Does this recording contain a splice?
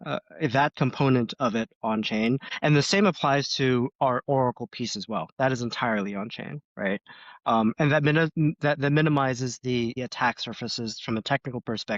yes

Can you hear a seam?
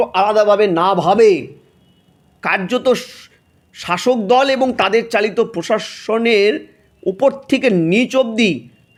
no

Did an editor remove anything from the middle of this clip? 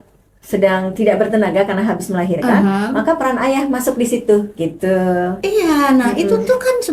no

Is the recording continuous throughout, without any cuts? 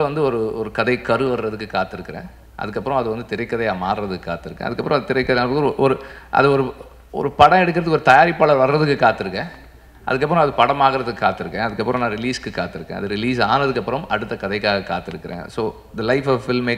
yes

